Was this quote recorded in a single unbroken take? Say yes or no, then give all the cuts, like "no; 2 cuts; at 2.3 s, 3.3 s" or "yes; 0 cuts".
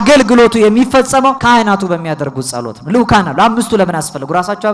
no; 1 cut; at 1.4 s